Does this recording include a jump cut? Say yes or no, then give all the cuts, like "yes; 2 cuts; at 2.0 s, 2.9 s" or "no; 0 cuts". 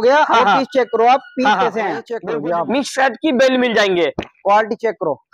yes; 1 cut; at 2.2 s